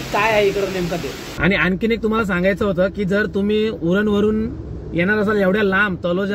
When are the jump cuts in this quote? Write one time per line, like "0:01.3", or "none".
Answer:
0:01.3